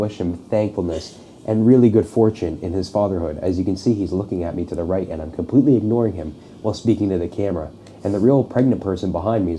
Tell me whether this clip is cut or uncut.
uncut